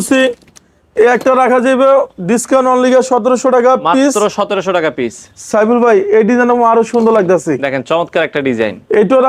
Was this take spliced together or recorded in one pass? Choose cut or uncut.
uncut